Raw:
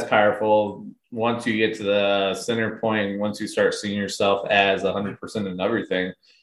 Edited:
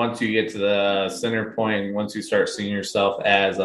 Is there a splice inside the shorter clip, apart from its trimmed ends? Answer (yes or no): no